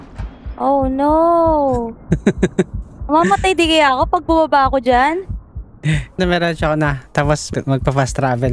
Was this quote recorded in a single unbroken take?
no; 2 cuts; at 6.2 s, 7.5 s

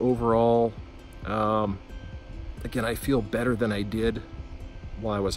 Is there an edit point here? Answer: no; 0 cuts

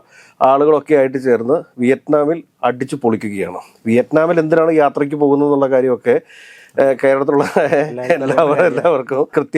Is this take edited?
no; 0 cuts

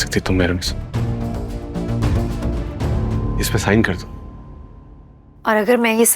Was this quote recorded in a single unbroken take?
no; 1 cut; at 2.7 s

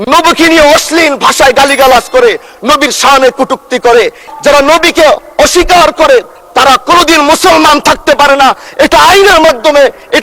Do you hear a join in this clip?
yes; 1 cut; at 4.2 s

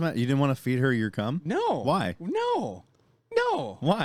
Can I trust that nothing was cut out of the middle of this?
yes; 0 cuts

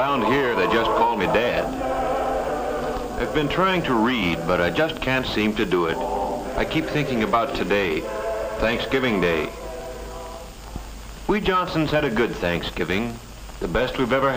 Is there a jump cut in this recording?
yes; 1 cut; at 8.4 s

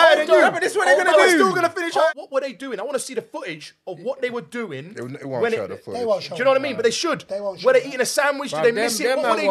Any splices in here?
yes; 1 cut; at 2.1 s

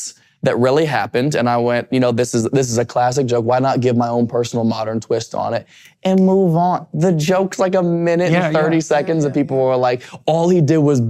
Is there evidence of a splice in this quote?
no; 0 cuts

